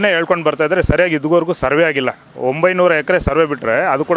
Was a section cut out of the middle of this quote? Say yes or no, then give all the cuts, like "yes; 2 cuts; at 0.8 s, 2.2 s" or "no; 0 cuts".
no; 0 cuts